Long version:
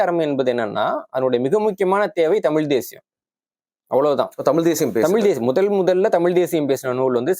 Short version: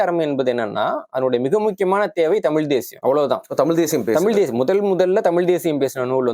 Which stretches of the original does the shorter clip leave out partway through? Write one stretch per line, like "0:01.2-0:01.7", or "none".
0:02.9-0:03.8